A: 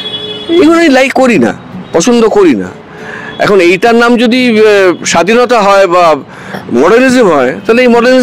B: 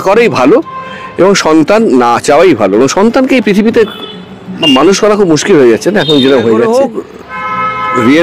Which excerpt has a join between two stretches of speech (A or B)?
B